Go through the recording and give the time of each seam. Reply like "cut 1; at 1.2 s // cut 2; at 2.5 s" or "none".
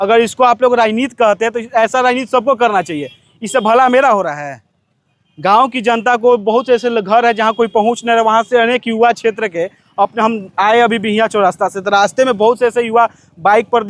none